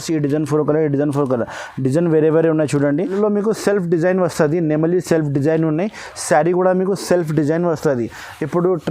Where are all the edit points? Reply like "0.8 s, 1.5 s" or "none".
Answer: 3.1 s

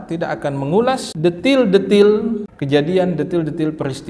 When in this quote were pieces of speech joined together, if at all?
1.1 s, 2.5 s

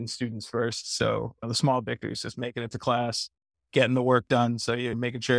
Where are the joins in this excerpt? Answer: none

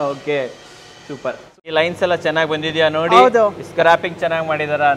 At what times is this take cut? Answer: 1.5 s

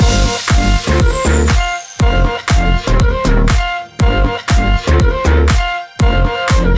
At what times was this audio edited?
none

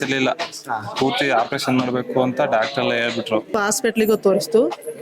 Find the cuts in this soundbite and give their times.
3.6 s

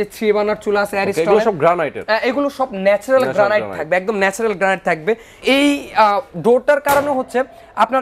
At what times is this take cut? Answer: 5.4 s

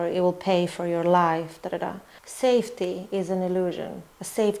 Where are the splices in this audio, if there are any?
2.0 s

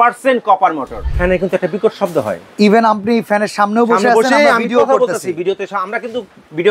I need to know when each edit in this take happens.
0.9 s

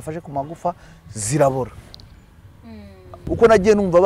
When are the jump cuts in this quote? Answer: 3.1 s

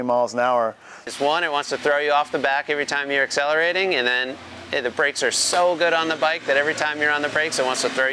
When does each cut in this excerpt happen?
1.1 s

